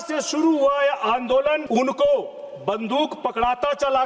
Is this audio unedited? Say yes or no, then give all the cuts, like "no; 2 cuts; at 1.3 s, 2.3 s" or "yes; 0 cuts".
no; 1 cut; at 1.6 s